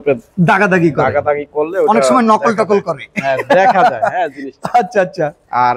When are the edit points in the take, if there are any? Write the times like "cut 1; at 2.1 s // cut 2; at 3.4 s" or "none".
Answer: none